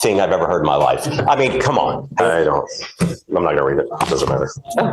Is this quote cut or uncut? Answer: cut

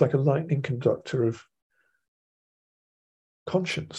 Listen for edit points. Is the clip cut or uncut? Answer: uncut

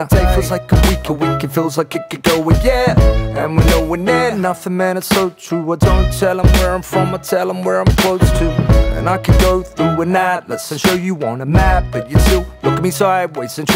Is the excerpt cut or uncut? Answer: uncut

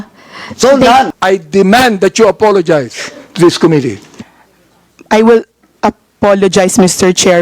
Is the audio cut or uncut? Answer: cut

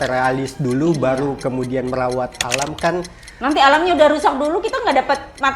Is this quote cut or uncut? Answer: cut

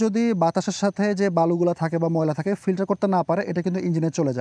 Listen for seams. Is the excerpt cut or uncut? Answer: uncut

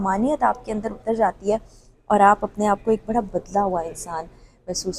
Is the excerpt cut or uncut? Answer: uncut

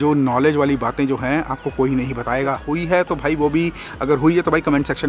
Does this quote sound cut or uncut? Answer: cut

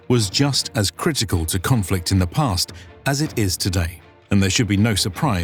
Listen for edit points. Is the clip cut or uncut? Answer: uncut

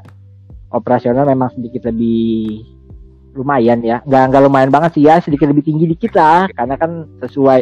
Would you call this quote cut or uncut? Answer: uncut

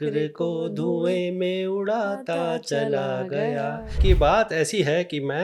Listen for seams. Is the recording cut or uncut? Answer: cut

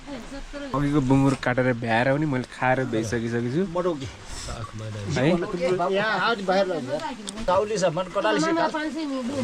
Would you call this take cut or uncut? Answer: cut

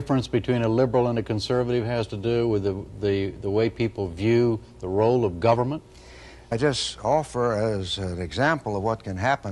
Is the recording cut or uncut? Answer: uncut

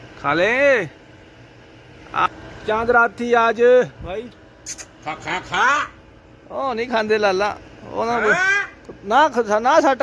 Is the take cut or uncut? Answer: cut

